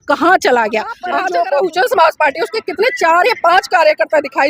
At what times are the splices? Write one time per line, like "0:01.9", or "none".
0:01.0